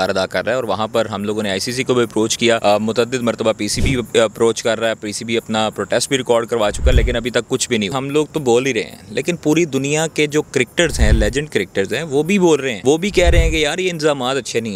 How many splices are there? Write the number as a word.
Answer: three